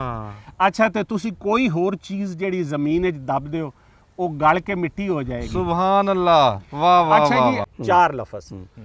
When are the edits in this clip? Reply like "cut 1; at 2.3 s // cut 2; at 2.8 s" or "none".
cut 1; at 7.7 s